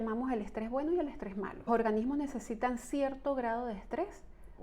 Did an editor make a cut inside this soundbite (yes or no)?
yes